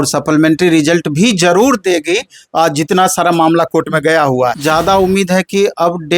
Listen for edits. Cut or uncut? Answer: cut